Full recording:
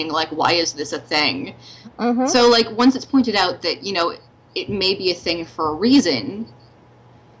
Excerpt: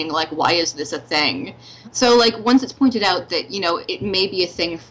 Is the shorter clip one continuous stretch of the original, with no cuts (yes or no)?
no